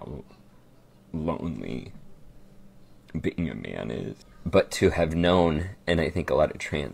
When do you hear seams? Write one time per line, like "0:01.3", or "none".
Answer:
0:04.1